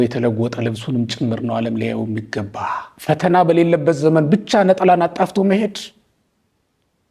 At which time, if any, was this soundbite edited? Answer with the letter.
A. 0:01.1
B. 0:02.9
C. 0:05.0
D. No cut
B